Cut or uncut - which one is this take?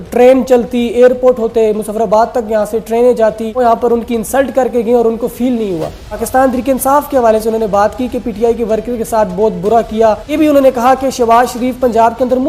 cut